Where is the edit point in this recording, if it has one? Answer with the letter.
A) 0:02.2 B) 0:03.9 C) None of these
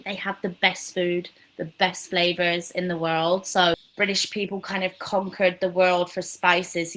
B